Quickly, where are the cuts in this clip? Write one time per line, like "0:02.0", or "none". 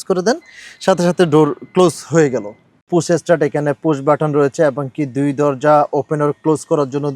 0:02.8